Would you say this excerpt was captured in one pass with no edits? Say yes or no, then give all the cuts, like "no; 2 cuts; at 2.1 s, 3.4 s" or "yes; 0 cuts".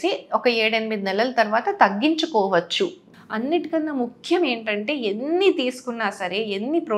no; 1 cut; at 3.1 s